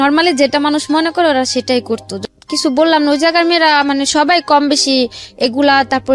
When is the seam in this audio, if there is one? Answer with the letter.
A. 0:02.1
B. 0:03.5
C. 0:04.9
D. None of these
A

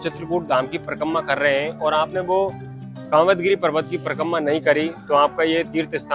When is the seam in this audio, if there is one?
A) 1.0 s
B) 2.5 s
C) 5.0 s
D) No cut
D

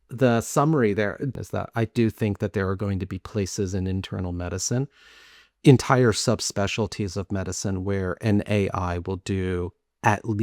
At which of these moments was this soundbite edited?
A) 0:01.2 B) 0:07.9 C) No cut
A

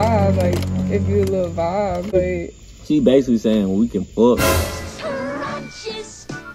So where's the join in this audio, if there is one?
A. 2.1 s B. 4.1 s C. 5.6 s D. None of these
A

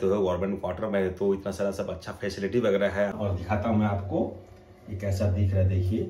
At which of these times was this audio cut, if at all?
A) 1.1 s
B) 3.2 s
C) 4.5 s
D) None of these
B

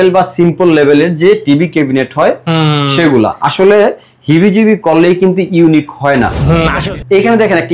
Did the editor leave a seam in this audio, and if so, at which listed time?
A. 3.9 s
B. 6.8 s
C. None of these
B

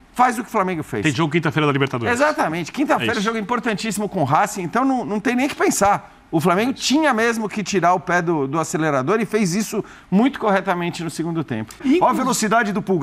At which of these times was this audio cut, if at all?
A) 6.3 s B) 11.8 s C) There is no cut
B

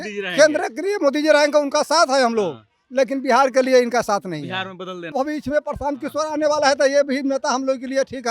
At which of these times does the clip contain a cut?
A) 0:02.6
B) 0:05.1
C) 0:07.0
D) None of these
B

